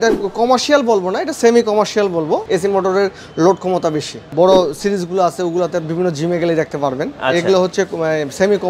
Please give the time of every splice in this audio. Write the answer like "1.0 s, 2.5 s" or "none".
2.4 s, 4.3 s